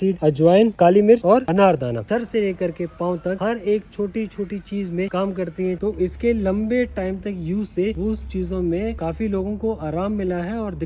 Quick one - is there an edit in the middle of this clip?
yes; 4 cuts; at 0.8 s, 2.1 s, 5.8 s, 9.0 s

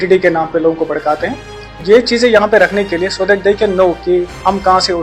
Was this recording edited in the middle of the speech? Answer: yes; 1 cut; at 1.7 s

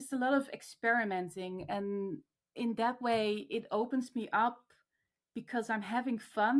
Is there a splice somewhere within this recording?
yes; 1 cut; at 2.4 s

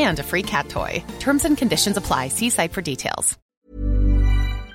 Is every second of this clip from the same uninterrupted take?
no; 1 cut; at 3.4 s

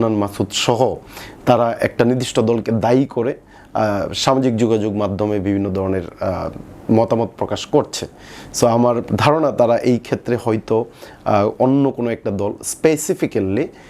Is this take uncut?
yes; 0 cuts

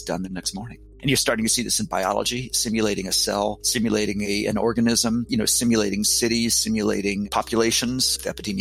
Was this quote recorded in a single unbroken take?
no; 1 cut; at 0.9 s

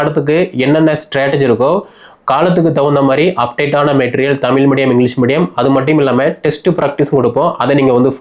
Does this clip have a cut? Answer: no; 0 cuts

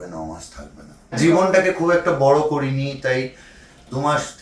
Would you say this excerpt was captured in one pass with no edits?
no; 1 cut; at 1.2 s

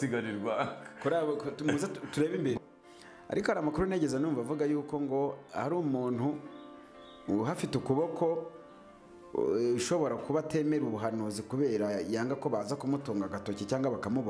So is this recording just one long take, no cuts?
no; 1 cut; at 2.6 s

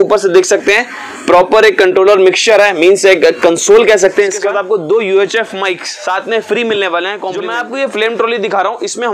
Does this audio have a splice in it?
yes; 2 cuts; at 4.4 s, 7.5 s

